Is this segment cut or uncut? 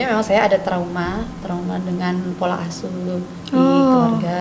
uncut